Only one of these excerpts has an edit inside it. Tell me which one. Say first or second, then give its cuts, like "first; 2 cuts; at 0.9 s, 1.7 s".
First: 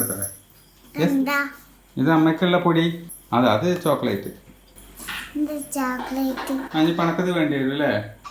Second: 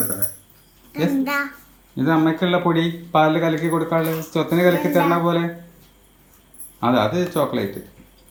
first; 1 cut; at 3.0 s